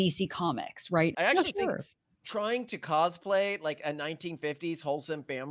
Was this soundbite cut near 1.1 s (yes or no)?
yes